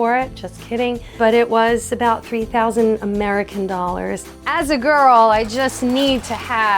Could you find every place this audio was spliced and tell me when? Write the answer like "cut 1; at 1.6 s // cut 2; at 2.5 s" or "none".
cut 1; at 1.2 s // cut 2; at 4.2 s